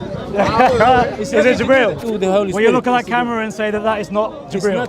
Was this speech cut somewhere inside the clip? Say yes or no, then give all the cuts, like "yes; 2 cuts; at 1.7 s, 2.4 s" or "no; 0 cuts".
yes; 1 cut; at 2.0 s